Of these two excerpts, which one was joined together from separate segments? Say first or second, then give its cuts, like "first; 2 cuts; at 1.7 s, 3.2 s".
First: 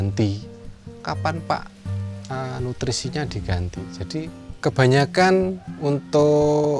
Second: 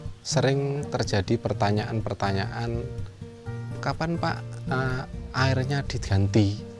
first; 1 cut; at 4.6 s